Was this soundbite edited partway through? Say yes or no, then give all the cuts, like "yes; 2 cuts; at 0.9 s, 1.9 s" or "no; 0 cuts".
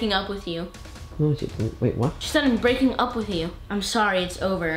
yes; 1 cut; at 3.6 s